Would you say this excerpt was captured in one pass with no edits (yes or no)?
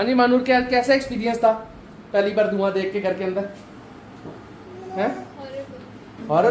yes